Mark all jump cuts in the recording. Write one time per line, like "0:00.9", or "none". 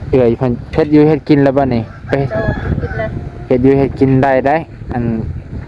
none